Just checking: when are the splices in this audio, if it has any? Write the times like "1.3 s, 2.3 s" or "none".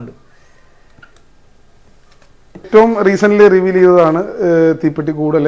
2.7 s